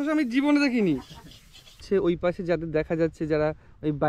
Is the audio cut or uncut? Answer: cut